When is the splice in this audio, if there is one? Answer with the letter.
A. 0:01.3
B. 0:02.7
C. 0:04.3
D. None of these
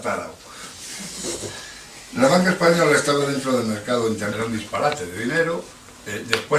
D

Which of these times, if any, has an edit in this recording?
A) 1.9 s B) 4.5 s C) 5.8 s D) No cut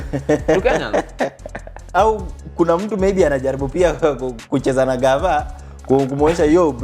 A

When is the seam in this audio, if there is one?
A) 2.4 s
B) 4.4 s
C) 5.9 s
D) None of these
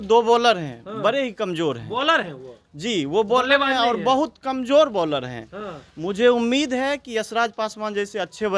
D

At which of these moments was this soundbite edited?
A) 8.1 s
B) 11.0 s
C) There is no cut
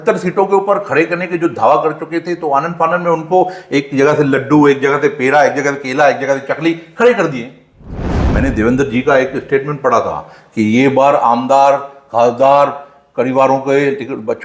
A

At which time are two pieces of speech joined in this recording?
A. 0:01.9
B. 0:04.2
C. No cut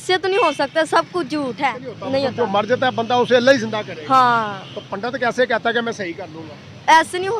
A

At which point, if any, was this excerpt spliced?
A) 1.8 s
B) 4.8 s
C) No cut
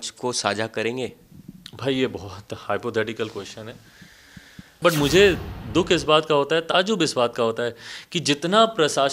B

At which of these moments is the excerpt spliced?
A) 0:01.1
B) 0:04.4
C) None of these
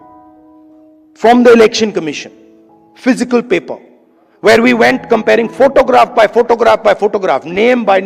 A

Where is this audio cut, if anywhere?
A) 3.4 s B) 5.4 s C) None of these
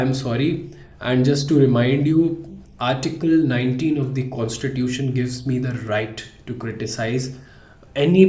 C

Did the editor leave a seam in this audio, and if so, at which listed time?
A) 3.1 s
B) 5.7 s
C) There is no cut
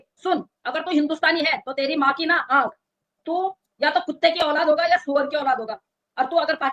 C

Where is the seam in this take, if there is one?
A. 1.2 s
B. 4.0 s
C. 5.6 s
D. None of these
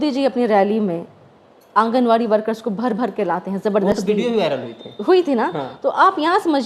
D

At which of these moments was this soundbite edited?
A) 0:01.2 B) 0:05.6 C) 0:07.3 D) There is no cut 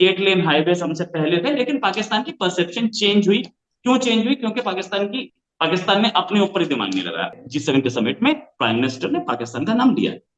C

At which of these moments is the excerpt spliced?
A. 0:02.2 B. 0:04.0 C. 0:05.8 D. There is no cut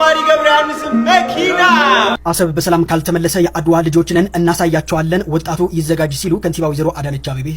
A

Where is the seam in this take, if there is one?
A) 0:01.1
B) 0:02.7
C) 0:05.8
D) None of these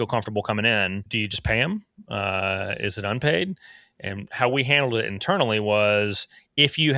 A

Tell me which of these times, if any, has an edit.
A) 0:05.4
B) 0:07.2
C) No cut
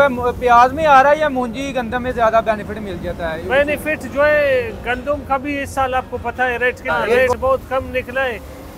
B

